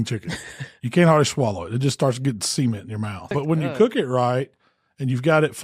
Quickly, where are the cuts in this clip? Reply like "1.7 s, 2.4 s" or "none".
3.3 s